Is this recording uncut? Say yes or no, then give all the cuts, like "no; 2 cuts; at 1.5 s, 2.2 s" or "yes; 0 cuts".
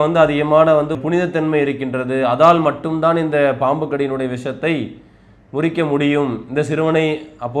no; 1 cut; at 1.0 s